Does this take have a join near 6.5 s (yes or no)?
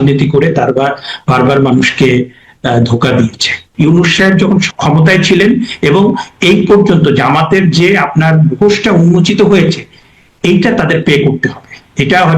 no